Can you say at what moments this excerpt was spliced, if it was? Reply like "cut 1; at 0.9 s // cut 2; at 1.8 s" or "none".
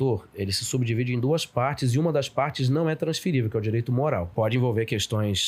cut 1; at 4.3 s